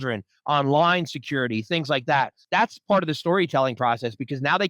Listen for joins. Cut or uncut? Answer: cut